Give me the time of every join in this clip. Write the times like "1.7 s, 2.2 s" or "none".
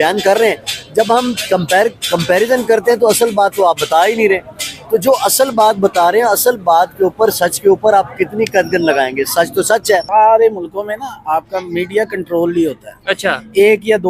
10.1 s